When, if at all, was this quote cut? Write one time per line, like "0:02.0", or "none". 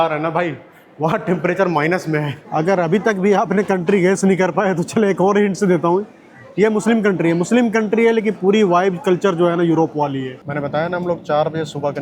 0:02.4
0:10.4